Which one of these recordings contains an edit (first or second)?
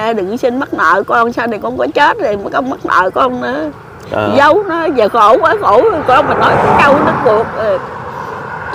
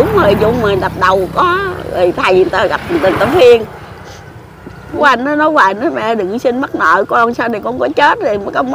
second